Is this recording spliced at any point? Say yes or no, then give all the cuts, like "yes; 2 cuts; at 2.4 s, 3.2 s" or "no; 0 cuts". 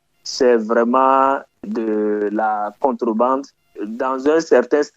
yes; 2 cuts; at 1.6 s, 3.8 s